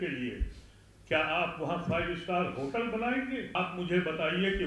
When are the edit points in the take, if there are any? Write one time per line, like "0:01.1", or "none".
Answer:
0:03.5